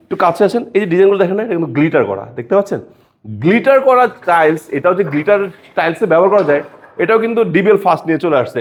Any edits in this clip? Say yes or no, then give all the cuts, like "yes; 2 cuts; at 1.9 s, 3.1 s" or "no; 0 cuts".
no; 0 cuts